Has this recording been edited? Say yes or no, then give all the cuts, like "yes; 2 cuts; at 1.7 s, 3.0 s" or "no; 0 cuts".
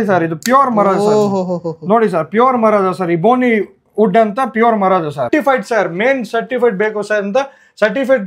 yes; 1 cut; at 5.3 s